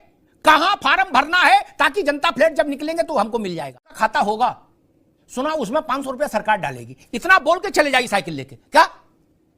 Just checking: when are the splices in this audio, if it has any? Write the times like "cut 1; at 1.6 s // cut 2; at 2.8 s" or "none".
cut 1; at 3.9 s

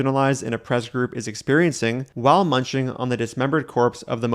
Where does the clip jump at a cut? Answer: cut 1; at 2.1 s

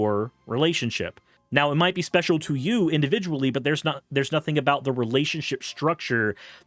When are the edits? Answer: none

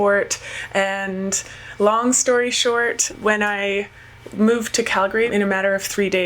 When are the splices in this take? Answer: cut 1; at 3.1 s // cut 2; at 5.3 s

